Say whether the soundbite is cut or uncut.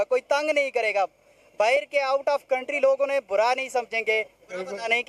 uncut